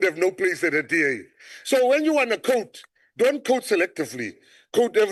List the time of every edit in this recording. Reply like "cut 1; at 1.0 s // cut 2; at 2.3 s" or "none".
none

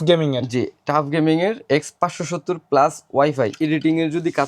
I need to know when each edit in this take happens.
cut 1; at 3.6 s

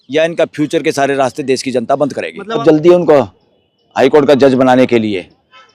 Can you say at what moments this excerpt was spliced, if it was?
cut 1; at 2.6 s

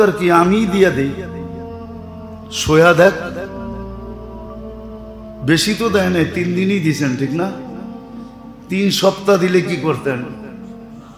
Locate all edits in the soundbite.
cut 1; at 1.2 s // cut 2; at 2.6 s // cut 3; at 3.6 s // cut 4; at 5.4 s // cut 5; at 10.2 s

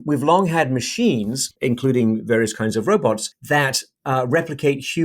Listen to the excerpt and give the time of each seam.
cut 1; at 1.4 s // cut 2; at 3.3 s

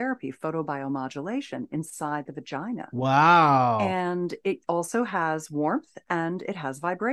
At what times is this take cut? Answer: none

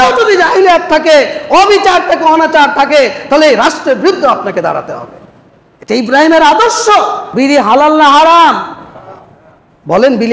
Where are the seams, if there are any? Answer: cut 1; at 7.2 s

